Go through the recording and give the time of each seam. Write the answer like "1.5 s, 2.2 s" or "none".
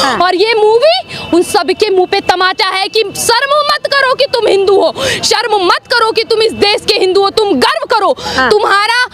none